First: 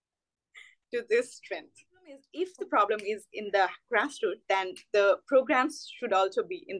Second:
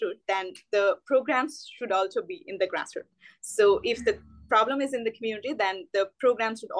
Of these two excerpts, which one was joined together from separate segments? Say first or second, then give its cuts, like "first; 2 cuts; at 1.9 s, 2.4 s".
first; 1 cut; at 2.3 s